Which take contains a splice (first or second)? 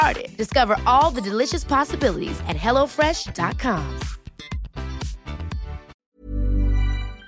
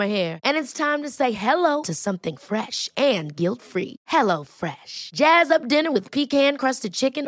first